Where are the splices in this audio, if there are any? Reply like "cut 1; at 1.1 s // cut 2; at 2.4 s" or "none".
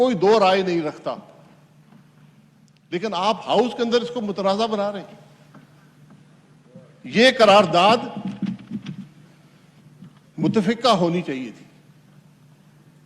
cut 1; at 3.0 s